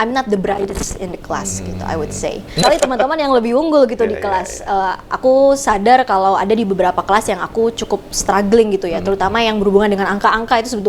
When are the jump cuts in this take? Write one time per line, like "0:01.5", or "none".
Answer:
0:02.6